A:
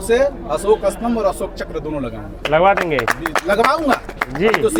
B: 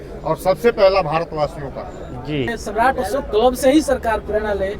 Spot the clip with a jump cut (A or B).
B